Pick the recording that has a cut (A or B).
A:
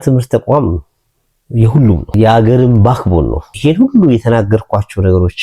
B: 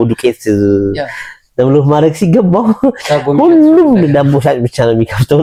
A